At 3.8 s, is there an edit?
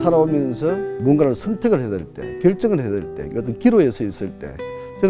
no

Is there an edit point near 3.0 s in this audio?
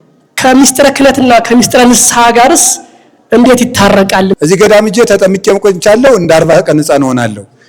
no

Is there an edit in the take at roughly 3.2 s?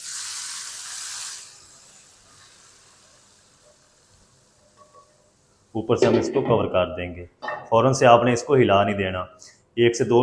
no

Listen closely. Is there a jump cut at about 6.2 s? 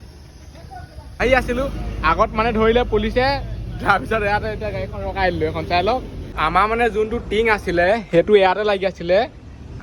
yes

